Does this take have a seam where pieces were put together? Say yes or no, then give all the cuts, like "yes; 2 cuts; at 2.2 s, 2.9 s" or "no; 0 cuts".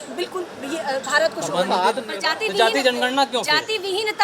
yes; 1 cut; at 2.1 s